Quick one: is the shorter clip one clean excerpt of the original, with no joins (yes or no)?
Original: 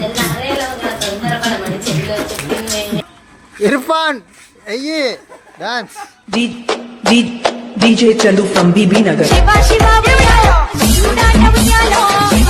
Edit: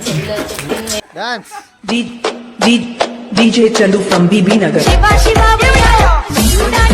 no